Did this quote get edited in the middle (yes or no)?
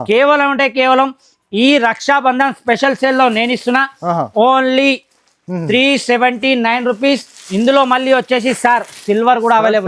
no